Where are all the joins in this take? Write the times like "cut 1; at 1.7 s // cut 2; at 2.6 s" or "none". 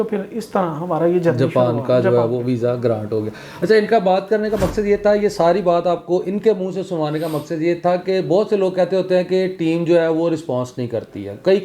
none